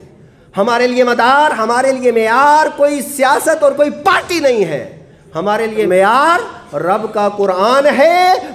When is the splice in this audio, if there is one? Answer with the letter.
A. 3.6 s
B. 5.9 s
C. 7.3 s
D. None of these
B